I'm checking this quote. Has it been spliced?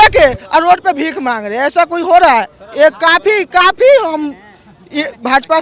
no; 0 cuts

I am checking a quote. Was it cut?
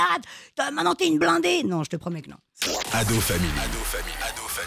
yes; 1 cut; at 2.5 s

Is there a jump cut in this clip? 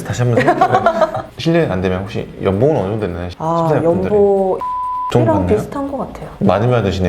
yes; 3 cuts; at 1.3 s, 4.9 s, 6.4 s

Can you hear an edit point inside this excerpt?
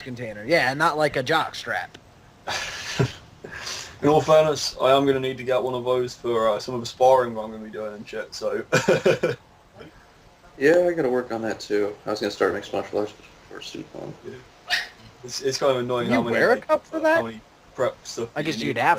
no; 0 cuts

